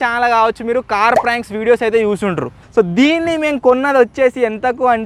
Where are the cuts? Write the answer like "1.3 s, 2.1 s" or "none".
2.6 s